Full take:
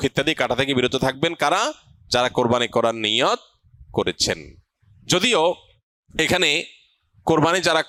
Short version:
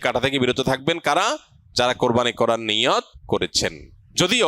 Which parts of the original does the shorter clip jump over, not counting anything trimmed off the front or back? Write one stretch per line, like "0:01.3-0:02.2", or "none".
0:03.9-0:04.4